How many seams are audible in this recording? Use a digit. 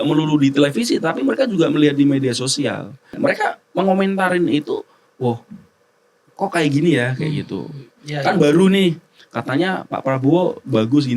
1